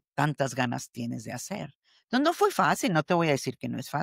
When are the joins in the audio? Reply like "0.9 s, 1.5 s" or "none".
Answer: none